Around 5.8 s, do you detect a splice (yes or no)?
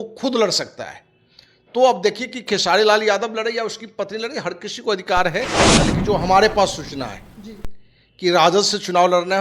yes